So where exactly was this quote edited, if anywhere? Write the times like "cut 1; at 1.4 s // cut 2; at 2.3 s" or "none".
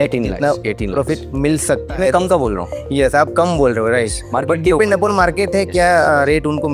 none